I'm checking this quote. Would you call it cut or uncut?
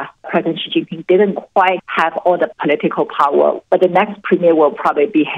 cut